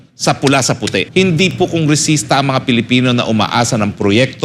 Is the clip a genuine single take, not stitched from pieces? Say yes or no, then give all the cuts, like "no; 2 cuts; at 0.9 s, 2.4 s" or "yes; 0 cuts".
no; 1 cut; at 1.1 s